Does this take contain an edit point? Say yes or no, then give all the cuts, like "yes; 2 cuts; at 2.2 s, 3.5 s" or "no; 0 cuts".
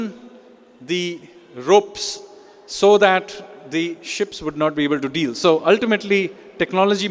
no; 0 cuts